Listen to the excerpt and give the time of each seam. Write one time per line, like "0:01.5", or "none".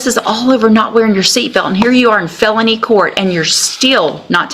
none